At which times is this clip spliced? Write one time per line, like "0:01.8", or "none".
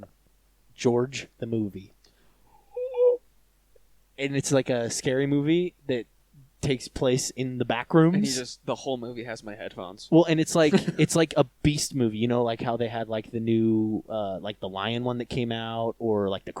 none